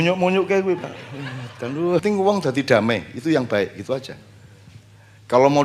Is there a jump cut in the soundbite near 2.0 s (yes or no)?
yes